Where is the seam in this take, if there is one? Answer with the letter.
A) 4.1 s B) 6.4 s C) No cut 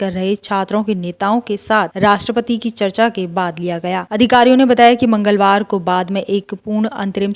A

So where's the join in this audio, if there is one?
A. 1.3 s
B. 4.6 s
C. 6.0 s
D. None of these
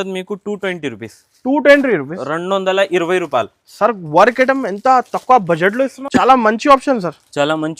C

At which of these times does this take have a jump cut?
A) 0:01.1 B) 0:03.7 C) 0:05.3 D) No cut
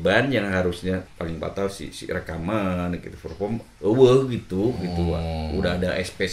A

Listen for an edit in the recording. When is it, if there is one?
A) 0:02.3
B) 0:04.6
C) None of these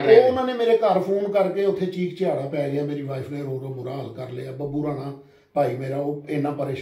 C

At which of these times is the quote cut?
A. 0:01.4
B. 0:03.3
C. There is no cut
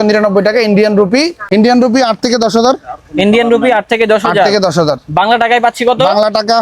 A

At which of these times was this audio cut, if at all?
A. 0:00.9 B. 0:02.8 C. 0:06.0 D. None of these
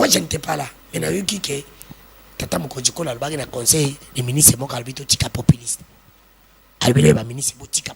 D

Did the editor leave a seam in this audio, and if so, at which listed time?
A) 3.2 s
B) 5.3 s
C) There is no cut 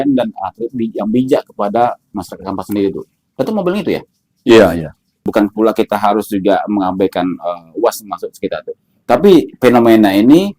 B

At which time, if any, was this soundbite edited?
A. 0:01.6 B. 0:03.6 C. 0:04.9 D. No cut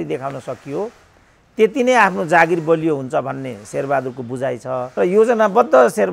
C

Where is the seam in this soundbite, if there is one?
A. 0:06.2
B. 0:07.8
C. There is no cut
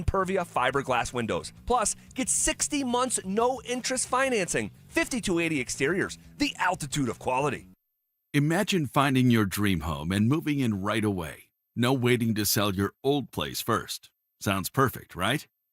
B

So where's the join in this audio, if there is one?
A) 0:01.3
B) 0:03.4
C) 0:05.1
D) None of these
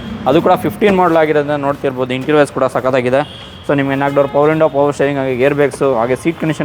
D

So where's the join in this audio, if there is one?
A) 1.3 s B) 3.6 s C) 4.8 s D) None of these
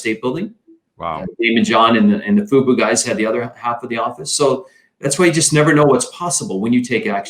D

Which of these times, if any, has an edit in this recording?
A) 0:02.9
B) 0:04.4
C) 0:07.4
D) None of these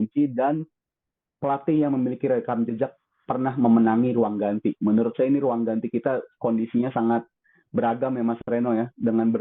D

